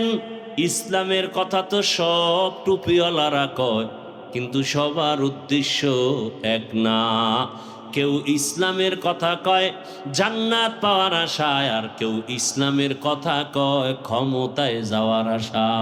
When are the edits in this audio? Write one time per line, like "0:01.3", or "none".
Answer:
none

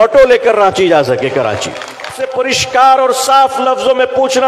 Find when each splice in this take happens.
0:02.2

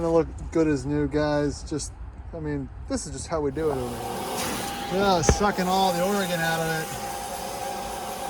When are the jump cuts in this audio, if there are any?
0:04.1

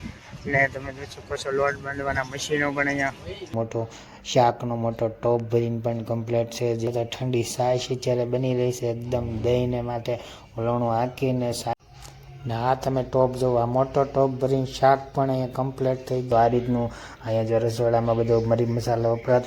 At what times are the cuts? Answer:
0:03.5
0:06.9
0:11.7
0:16.3

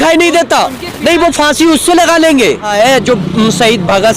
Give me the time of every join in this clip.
0:02.7

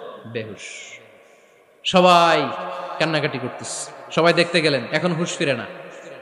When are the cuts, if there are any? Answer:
none

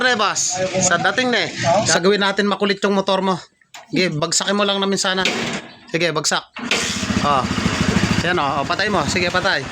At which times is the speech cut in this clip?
0:01.9

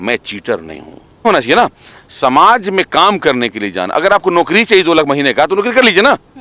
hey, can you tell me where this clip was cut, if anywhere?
none

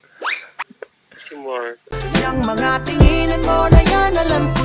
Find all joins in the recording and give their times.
0:01.9

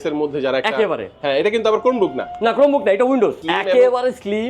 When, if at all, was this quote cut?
0:03.4

